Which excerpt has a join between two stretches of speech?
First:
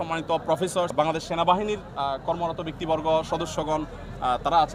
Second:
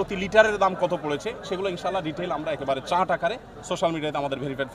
first; 1 cut; at 0.9 s

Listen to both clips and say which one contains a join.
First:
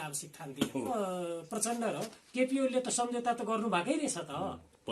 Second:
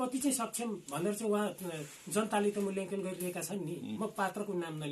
first; 1 cut; at 0.9 s

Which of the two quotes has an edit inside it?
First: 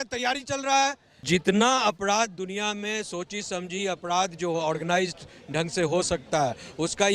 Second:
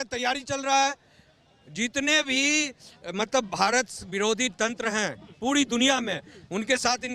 first; 1 cut; at 1.2 s

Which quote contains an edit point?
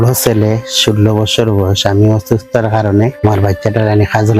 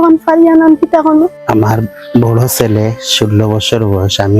second; 1 cut; at 1.3 s

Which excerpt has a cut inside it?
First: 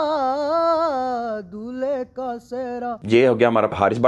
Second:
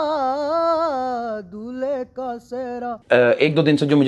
second; 1 cut; at 3.0 s

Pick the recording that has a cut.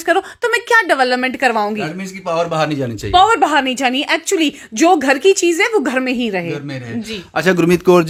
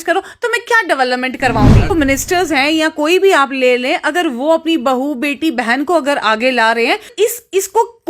second; 2 cuts; at 1.9 s, 7.1 s

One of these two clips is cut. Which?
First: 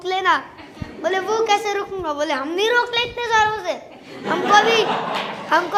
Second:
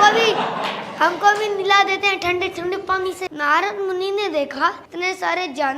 second; 2 cuts; at 3.3 s, 4.9 s

